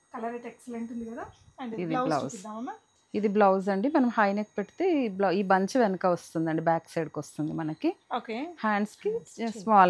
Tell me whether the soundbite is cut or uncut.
uncut